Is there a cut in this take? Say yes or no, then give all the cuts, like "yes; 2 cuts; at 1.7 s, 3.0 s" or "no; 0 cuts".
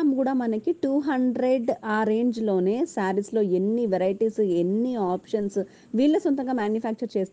no; 0 cuts